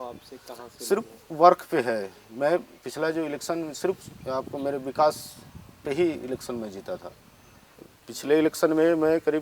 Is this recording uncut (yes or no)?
yes